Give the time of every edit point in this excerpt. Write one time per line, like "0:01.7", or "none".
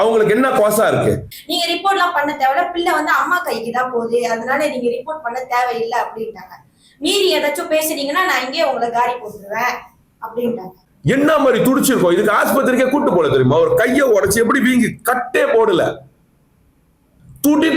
0:01.3
0:10.8